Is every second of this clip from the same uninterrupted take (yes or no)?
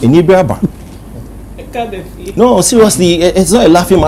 yes